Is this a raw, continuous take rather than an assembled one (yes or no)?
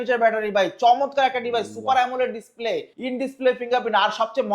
no